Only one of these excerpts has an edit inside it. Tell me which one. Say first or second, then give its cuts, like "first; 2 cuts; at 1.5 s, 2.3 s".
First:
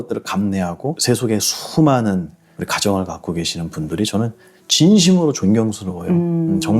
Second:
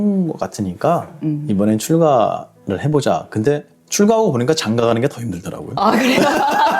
first; 1 cut; at 1.0 s